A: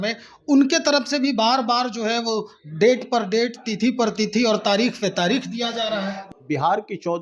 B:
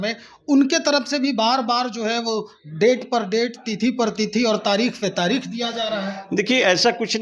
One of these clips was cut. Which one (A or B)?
A